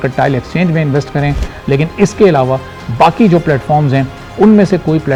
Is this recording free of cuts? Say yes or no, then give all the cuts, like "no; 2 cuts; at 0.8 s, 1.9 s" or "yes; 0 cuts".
yes; 0 cuts